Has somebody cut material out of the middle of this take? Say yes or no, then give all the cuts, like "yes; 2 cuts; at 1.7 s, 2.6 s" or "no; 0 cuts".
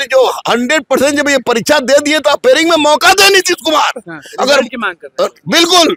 no; 0 cuts